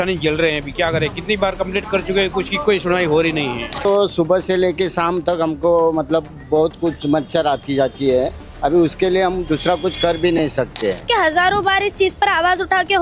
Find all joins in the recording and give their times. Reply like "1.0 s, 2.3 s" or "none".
3.8 s, 11.0 s